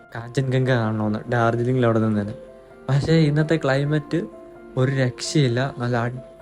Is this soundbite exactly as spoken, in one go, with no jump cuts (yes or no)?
yes